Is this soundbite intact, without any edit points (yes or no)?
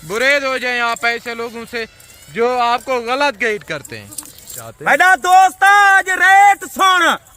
no